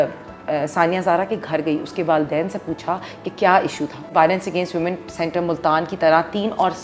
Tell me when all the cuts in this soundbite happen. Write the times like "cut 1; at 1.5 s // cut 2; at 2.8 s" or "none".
cut 1; at 4.1 s